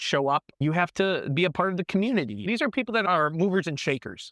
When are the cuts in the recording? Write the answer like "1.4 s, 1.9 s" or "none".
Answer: 2.4 s